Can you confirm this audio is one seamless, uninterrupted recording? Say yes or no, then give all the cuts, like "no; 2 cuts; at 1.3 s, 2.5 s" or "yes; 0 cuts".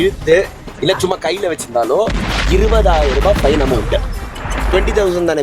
yes; 0 cuts